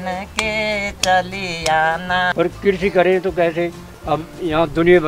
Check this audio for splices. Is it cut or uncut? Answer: cut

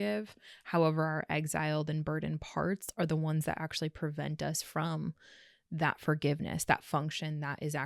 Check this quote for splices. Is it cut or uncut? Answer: uncut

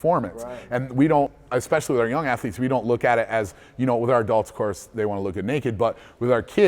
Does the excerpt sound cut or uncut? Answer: cut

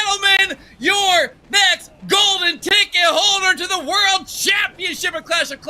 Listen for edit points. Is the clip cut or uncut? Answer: uncut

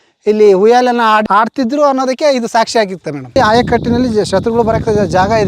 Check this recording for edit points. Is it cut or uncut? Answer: cut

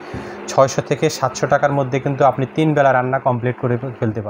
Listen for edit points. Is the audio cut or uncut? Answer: uncut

